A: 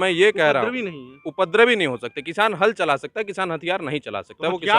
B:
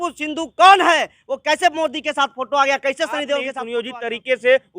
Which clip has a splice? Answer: B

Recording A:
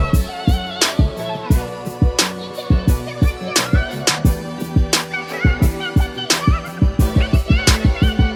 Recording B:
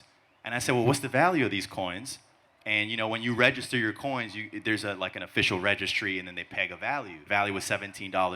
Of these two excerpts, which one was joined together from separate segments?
B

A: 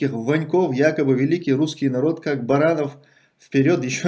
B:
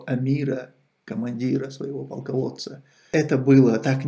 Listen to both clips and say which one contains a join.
B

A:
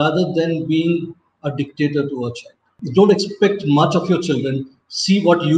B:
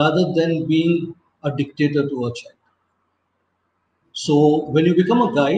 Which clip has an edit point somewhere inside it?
A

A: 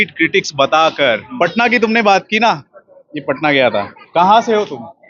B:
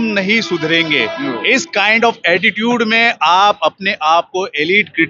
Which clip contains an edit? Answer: A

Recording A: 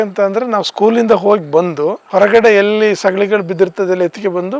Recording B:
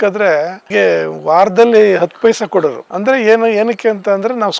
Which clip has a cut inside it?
B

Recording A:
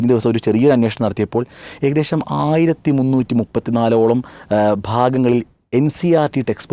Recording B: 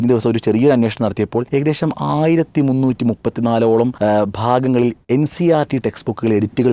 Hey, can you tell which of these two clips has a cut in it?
B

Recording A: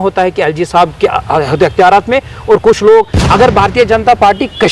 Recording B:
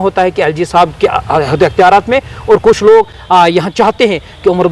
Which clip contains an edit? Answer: A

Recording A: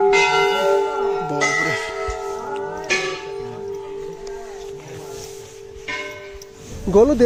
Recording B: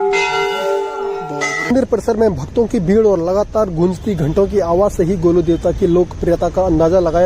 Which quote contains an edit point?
B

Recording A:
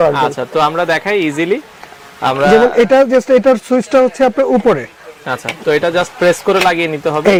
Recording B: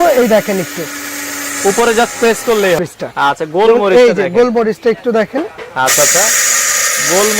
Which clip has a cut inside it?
B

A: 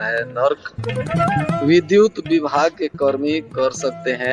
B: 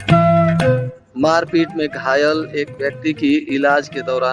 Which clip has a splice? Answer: B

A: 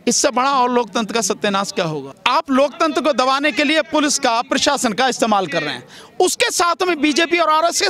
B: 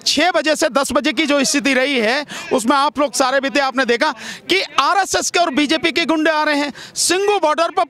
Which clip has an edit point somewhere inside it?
A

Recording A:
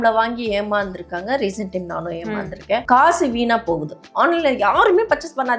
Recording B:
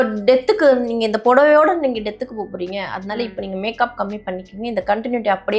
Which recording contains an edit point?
A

